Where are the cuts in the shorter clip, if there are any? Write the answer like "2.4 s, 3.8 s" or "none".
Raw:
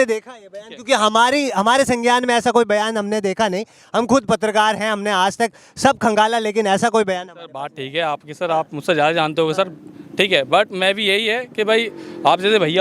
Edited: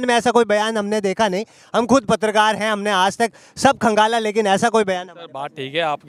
none